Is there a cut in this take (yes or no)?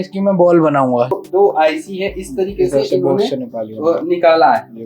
yes